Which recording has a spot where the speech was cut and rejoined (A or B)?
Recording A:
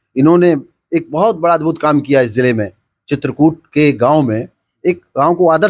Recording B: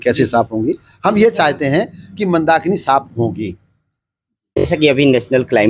B